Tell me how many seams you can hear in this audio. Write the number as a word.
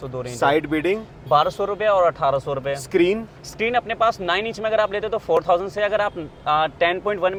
zero